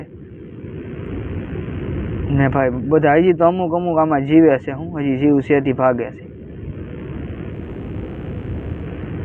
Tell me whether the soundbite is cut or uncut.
uncut